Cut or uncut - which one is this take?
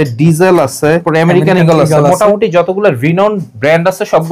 cut